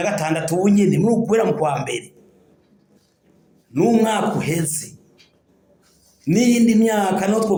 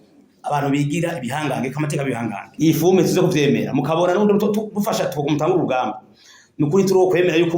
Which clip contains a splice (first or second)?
second